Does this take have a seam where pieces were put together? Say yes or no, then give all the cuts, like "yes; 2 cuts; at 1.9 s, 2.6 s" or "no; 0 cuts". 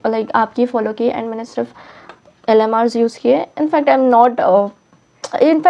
no; 0 cuts